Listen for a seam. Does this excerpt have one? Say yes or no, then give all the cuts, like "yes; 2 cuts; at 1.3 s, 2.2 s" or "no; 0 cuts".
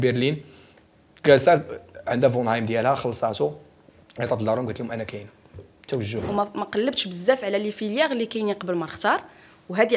yes; 1 cut; at 6.2 s